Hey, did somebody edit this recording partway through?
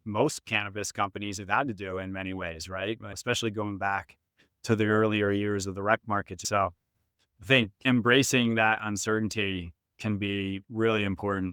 yes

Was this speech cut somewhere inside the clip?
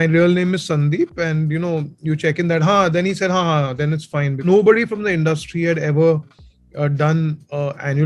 yes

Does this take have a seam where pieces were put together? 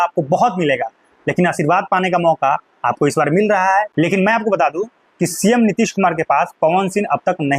yes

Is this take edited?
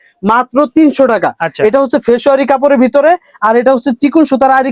no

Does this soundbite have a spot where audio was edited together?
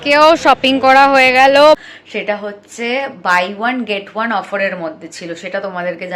yes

